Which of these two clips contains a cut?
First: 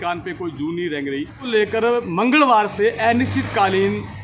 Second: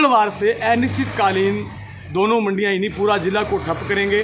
first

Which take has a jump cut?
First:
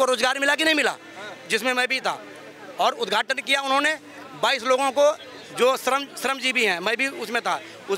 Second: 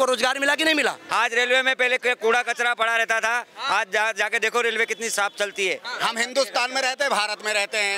second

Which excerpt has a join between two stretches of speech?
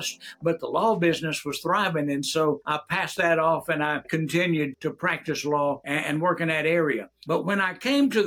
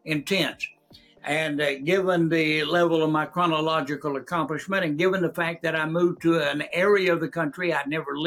first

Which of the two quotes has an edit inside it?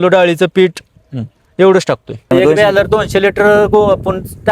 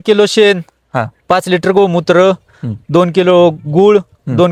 first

